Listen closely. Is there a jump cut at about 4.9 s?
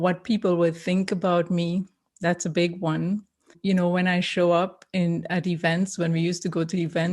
no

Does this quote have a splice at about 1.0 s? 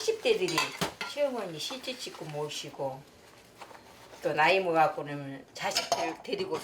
yes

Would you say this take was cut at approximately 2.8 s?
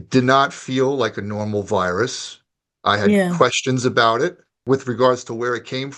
no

